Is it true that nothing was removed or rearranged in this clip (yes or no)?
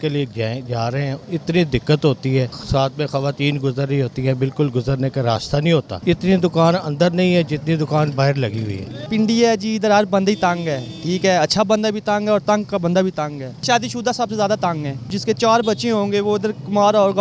no